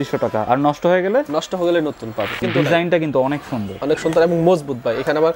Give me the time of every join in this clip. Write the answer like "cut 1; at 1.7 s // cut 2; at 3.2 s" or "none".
cut 1; at 2.4 s